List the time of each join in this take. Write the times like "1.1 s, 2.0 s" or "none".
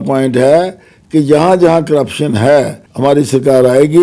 2.8 s